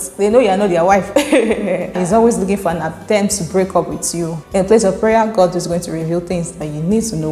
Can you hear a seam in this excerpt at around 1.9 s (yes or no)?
yes